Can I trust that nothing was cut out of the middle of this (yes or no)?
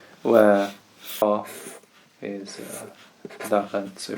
no